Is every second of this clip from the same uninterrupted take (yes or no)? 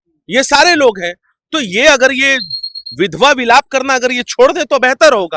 yes